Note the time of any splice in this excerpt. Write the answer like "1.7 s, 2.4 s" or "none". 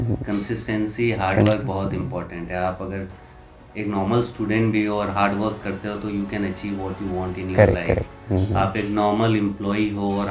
none